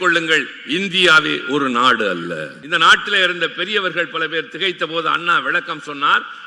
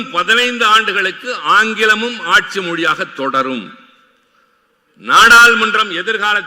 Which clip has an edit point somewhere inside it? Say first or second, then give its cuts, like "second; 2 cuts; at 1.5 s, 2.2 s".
first; 1 cut; at 2.6 s